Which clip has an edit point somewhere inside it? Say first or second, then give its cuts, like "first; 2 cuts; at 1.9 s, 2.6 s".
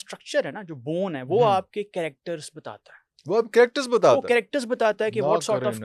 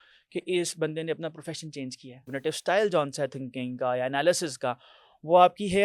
second; 1 cut; at 2.3 s